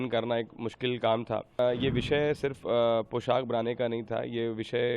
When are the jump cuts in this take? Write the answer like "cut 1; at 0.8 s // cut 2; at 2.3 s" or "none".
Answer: cut 1; at 1.6 s